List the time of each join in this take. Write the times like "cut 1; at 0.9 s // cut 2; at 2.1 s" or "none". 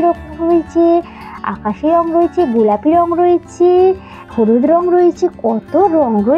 cut 1; at 4.1 s